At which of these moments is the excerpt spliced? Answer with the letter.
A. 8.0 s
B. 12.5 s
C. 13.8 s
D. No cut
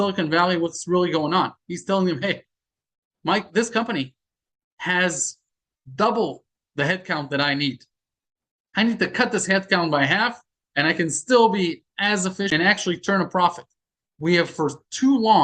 B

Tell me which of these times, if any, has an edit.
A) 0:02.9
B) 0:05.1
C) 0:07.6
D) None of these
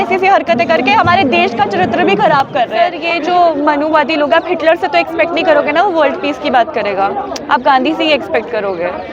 A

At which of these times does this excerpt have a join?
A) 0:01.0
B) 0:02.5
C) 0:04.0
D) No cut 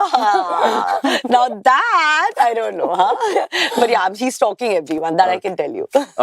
D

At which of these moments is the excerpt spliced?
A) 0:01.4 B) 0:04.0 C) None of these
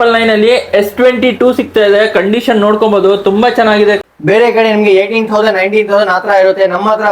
B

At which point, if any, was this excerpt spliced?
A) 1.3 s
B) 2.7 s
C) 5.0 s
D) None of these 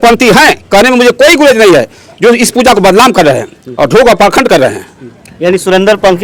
D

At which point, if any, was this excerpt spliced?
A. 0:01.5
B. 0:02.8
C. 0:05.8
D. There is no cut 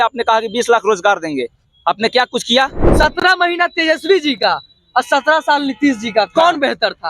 B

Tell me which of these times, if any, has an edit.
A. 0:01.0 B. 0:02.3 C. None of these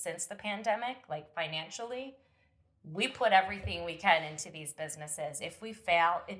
C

